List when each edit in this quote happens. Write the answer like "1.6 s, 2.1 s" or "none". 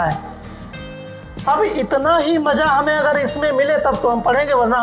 none